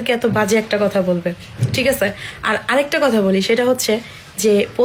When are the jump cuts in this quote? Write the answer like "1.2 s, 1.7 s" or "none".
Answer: none